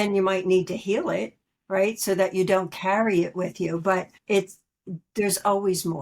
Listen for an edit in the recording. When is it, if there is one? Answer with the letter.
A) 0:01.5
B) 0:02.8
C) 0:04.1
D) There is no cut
C